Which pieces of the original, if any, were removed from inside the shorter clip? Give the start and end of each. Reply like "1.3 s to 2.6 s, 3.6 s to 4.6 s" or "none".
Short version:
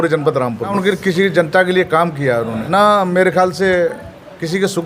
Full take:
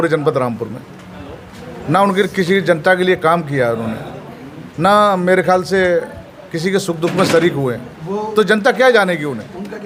0.7 s to 2.1 s, 3.9 s to 4.7 s